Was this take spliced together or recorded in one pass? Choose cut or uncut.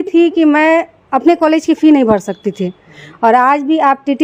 uncut